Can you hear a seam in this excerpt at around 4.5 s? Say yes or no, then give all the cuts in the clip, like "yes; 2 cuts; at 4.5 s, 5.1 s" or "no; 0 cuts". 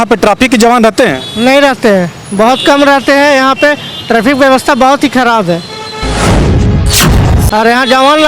no; 2 cuts; at 6.1 s, 7.4 s